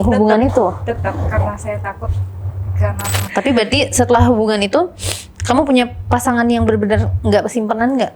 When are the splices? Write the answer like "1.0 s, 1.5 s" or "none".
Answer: 3.2 s

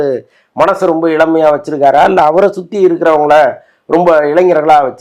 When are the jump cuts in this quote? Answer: none

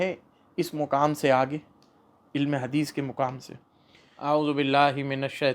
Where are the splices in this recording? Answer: 4.1 s

